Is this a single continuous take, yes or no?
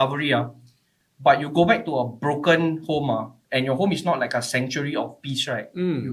yes